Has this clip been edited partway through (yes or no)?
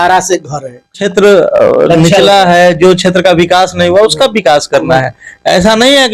yes